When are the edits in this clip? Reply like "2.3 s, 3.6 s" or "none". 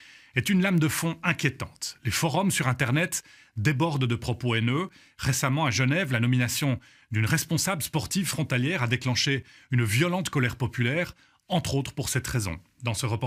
none